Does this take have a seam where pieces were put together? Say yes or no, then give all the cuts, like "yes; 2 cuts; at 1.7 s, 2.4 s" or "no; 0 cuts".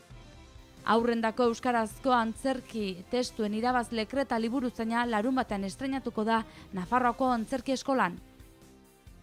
no; 0 cuts